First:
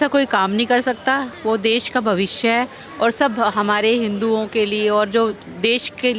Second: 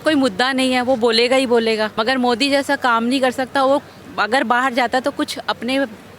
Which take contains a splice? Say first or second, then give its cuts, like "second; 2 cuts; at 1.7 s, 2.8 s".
second; 1 cut; at 1.9 s